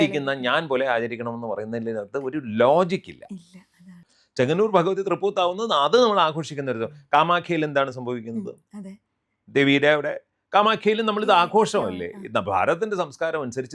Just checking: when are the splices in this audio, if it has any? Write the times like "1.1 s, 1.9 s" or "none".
3.9 s

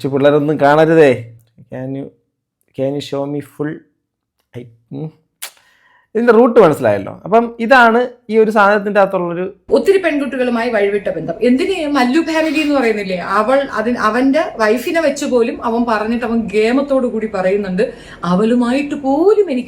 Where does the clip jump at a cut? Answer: 1.4 s, 9.5 s

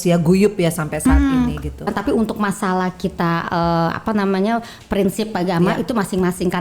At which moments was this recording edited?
1.9 s

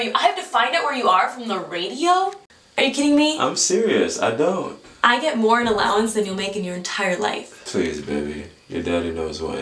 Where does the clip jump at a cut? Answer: 2.5 s

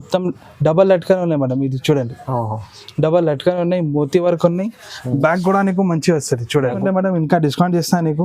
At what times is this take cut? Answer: 6.8 s

